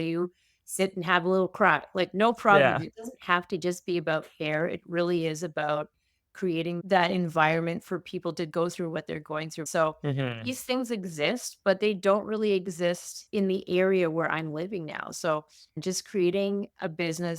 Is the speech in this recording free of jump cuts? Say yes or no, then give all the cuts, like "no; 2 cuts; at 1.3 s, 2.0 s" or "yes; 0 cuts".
no; 3 cuts; at 9.6 s, 13.2 s, 15.8 s